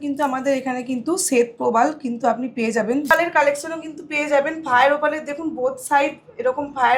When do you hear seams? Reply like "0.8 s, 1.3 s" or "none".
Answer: 3.1 s